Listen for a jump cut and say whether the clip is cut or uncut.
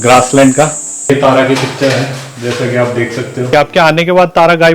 cut